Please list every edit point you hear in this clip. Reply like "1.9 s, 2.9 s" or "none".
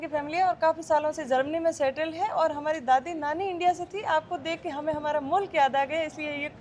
none